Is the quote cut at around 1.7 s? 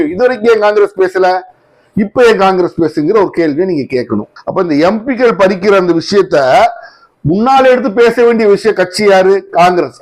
no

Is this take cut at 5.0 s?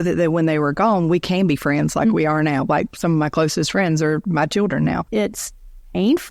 yes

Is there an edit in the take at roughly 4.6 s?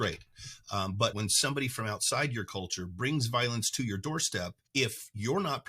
yes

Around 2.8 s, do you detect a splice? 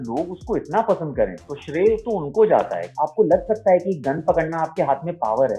yes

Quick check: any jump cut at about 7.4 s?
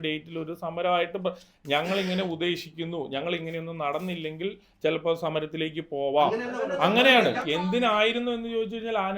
yes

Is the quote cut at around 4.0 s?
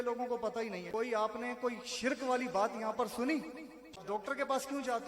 yes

